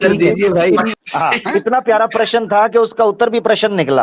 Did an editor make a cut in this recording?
yes; 1 cut; at 1.0 s

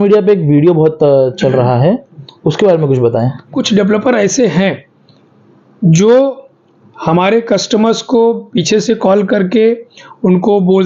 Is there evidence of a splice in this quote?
yes; 1 cut; at 3.6 s

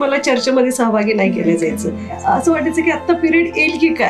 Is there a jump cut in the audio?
yes; 1 cut; at 2.2 s

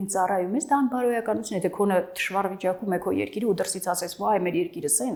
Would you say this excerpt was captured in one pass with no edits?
yes; 0 cuts

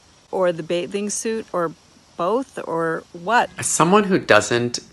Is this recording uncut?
no; 2 cuts; at 1.5 s, 3.6 s

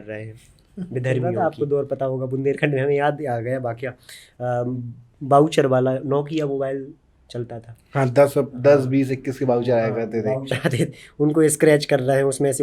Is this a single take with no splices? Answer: no; 1 cut; at 1.3 s

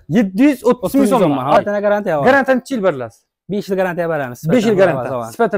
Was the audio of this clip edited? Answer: yes; 1 cut; at 1.6 s

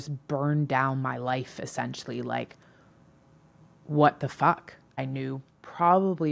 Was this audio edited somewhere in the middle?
yes; 1 cut; at 5.1 s

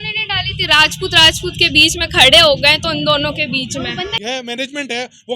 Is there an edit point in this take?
yes; 1 cut; at 4.2 s

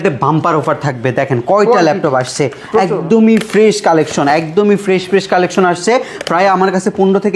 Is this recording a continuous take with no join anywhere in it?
yes; 0 cuts

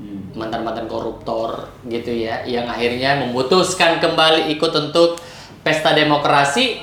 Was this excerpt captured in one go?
yes; 0 cuts

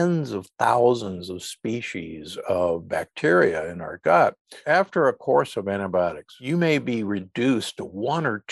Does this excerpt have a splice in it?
yes; 2 cuts; at 4.6 s, 6.3 s

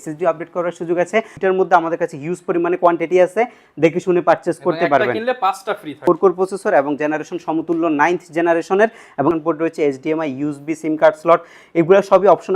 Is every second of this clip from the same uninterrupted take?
no; 3 cuts; at 1.3 s, 6.0 s, 9.3 s

